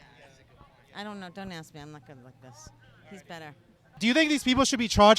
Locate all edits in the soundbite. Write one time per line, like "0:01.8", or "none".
0:04.0